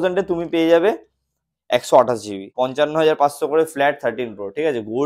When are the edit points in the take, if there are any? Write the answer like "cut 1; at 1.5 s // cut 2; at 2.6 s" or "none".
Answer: cut 1; at 2.4 s